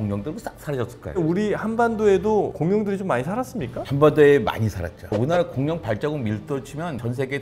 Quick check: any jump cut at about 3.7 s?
no; 2 cuts; at 1.2 s, 5.1 s

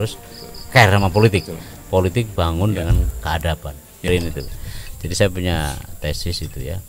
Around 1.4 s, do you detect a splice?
no; 1 cut; at 4.1 s

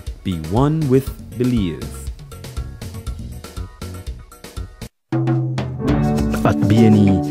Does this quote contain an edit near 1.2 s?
no; 1 cut; at 4.9 s

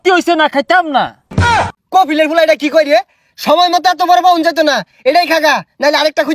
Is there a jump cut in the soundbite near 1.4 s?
yes; 1 cut; at 1.4 s

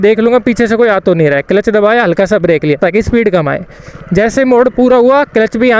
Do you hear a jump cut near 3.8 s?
no; 0 cuts

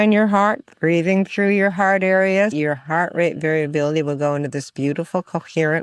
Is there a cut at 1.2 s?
no; 1 cut; at 2.5 s

